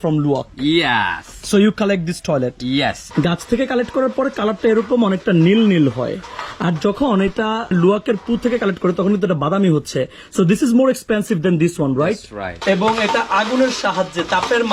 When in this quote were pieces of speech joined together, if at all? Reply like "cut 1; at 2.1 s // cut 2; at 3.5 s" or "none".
cut 1; at 3.0 s // cut 2; at 7.7 s // cut 3; at 12.5 s

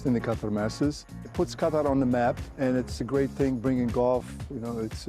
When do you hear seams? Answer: cut 1; at 1.1 s // cut 2; at 2.8 s

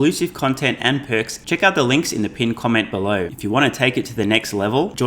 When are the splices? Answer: cut 1; at 1.4 s // cut 2; at 3.3 s

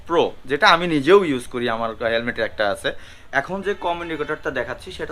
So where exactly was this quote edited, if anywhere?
cut 1; at 3.1 s

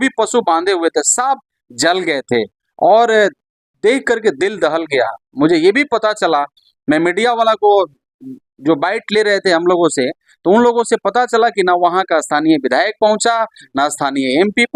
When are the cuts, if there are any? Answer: none

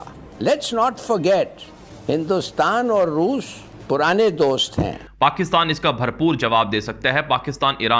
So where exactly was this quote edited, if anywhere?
cut 1; at 5.0 s

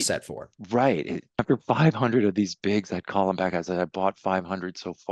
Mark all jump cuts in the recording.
cut 1; at 1.3 s

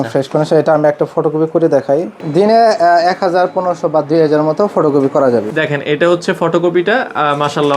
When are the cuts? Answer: cut 1; at 2.1 s // cut 2; at 5.5 s

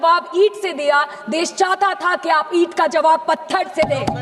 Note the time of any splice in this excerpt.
none

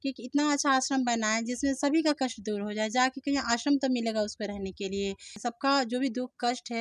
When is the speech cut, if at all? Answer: cut 1; at 5.4 s

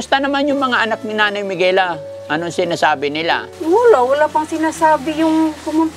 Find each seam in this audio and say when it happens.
cut 1; at 3.5 s

